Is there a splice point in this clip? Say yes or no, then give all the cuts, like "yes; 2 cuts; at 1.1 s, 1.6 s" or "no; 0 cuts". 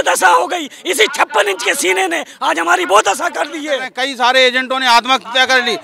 yes; 1 cut; at 4.0 s